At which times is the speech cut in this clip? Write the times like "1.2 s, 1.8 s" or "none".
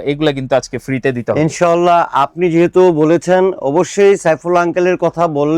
none